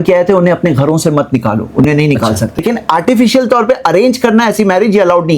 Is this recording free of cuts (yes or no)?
no